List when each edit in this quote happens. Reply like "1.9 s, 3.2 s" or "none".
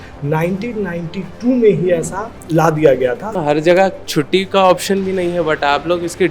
3.3 s